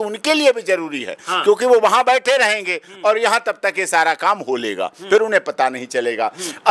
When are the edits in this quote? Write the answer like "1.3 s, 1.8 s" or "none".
none